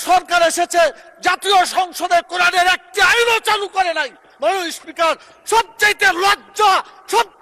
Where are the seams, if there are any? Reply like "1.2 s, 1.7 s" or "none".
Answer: none